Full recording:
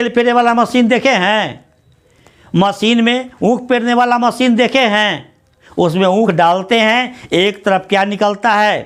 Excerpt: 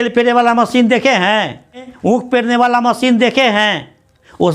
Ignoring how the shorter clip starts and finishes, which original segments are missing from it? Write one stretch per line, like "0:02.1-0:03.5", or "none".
0:01.9-0:03.3